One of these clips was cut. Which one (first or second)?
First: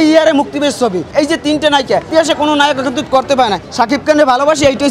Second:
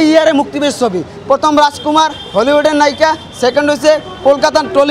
first